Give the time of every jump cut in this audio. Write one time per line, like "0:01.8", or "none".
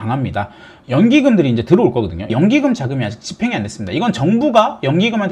none